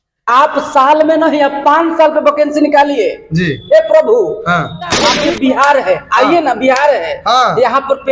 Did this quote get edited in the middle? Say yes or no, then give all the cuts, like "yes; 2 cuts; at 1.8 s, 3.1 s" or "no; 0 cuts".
yes; 1 cut; at 5.1 s